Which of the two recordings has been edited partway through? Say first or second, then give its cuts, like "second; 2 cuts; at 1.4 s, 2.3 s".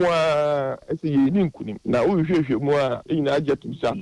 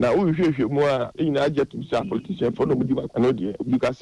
second; 1 cut; at 3.1 s